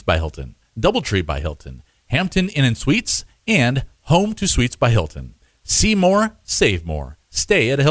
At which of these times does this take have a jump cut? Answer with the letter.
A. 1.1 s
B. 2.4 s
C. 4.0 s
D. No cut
D